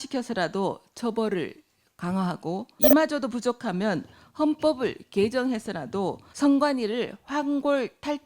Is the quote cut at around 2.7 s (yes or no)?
yes